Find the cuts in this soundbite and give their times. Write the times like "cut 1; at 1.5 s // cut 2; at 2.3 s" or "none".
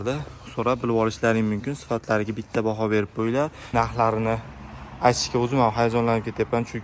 cut 1; at 3.6 s